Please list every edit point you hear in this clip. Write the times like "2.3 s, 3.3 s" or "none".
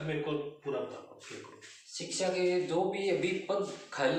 none